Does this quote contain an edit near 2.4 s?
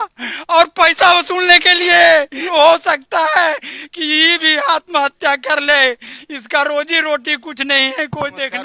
yes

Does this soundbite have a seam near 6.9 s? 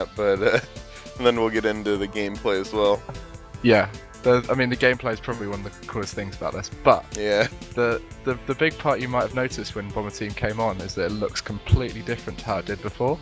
no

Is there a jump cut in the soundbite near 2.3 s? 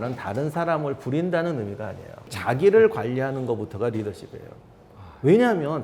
yes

